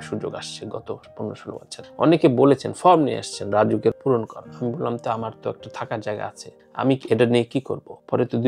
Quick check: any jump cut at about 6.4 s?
no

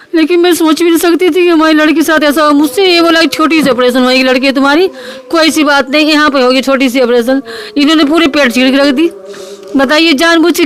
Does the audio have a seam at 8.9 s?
no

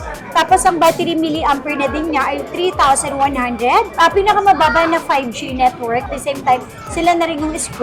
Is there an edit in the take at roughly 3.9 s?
yes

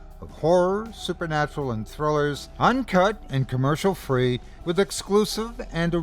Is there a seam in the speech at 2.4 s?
yes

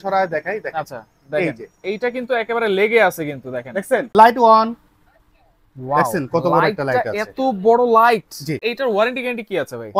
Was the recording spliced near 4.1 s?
yes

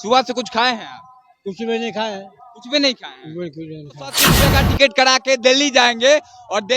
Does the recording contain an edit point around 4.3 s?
yes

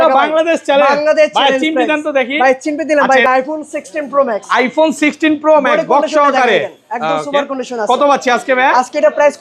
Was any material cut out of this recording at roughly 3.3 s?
yes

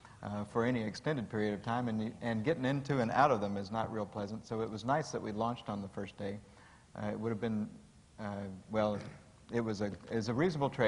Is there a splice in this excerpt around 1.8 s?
yes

